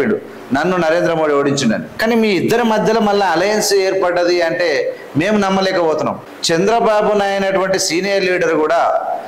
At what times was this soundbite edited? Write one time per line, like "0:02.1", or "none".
0:01.9
0:06.3